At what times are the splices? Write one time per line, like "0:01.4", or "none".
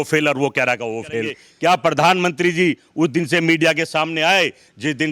0:01.4